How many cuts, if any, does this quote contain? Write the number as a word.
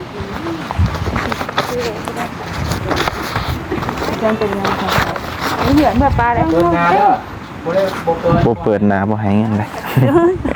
zero